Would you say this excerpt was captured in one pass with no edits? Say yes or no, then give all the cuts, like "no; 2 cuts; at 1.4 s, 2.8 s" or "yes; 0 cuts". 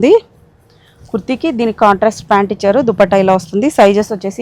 yes; 0 cuts